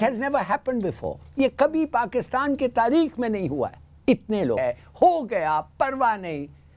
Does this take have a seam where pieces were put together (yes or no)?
yes